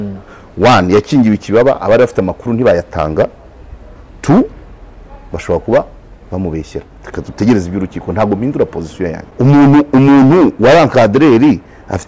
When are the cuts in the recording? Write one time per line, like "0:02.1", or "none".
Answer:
0:09.2